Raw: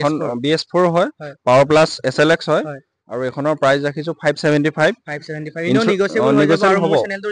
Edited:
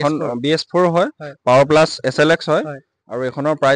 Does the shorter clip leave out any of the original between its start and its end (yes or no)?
no